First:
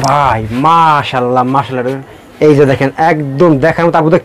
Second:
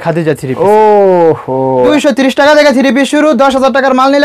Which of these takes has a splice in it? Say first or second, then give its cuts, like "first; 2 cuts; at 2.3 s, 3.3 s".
second; 1 cut; at 1.9 s